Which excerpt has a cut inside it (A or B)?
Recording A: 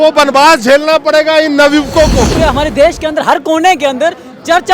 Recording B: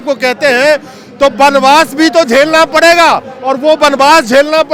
A